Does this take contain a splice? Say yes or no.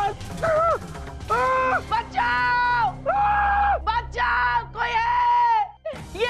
no